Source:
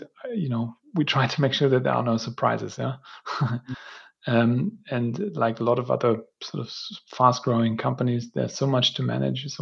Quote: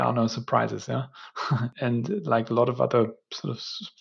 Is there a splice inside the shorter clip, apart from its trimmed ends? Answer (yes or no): yes